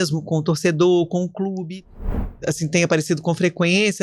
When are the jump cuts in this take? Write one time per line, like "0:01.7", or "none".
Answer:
0:02.1